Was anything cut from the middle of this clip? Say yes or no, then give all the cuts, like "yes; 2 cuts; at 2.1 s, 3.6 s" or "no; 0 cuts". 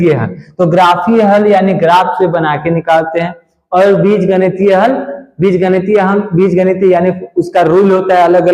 no; 0 cuts